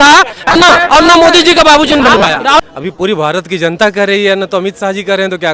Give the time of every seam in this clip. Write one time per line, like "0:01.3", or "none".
0:02.6